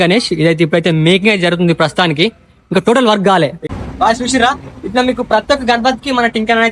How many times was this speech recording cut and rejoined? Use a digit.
1